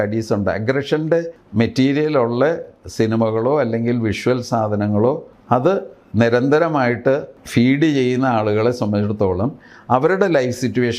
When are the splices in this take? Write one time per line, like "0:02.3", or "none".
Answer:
0:01.4
0:05.3
0:07.4